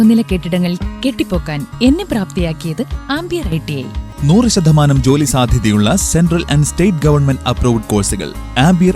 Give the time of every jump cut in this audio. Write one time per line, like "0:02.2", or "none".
0:04.1